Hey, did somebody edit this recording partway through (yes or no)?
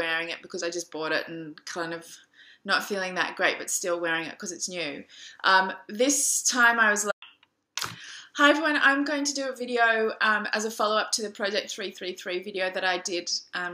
no